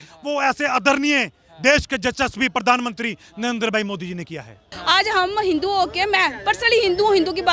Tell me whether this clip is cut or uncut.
cut